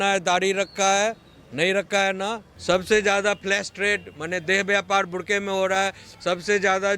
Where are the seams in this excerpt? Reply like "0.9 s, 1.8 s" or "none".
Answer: 2.5 s